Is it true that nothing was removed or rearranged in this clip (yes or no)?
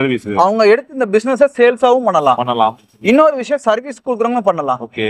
yes